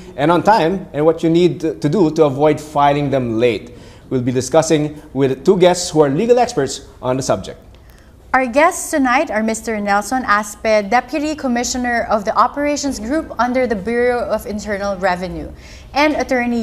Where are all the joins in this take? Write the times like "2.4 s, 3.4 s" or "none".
none

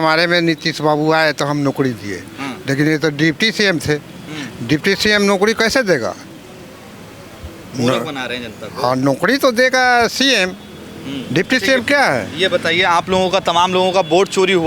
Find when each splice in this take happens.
none

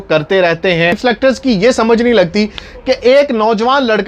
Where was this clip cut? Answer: 1.0 s

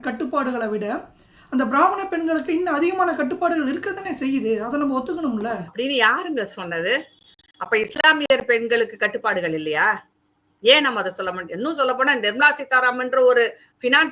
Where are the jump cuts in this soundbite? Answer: 5.7 s

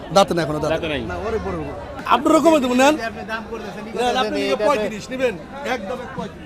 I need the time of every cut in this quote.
1.9 s

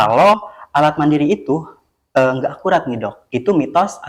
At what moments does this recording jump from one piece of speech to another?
none

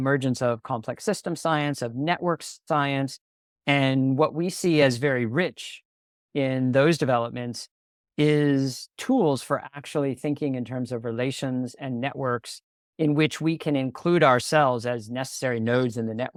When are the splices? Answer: none

